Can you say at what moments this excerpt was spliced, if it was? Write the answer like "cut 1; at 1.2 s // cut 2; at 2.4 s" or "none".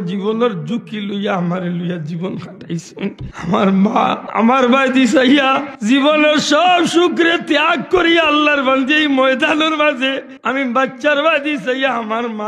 cut 1; at 3.3 s // cut 2; at 4.2 s // cut 3; at 5.7 s // cut 4; at 10.3 s